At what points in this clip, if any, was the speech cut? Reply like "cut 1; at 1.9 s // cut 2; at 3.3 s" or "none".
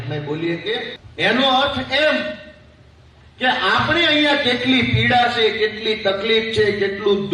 cut 1; at 1.0 s